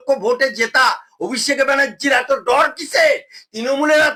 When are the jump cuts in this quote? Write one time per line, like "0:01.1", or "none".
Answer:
none

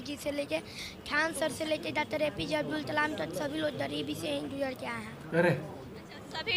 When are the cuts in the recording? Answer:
none

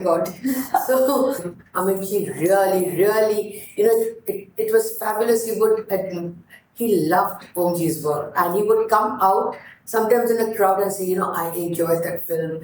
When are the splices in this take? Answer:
0:01.5

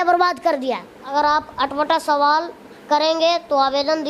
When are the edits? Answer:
0:01.0

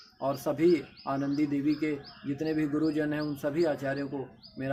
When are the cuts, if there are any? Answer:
none

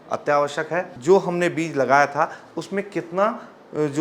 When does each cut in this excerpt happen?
0:00.9

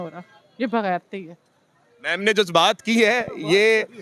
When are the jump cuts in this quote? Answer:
none

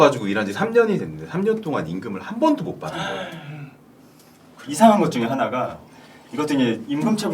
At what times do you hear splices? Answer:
0:04.4

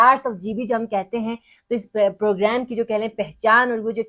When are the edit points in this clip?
none

